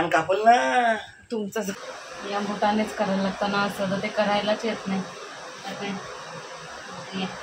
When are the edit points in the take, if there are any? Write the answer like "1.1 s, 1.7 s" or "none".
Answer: 1.9 s